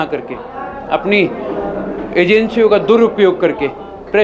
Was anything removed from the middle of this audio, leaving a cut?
no; 0 cuts

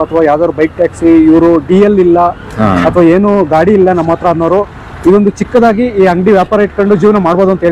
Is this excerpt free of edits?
yes; 0 cuts

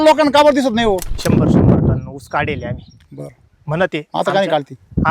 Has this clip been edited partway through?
yes; 1 cut; at 1.1 s

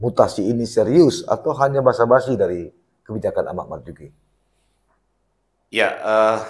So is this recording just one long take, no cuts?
yes; 0 cuts

